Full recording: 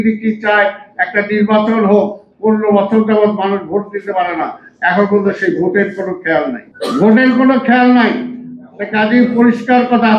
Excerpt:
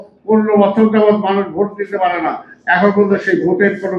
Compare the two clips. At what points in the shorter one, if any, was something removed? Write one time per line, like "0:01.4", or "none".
none